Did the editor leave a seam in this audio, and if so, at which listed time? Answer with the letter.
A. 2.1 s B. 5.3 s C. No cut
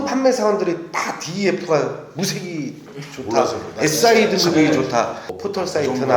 B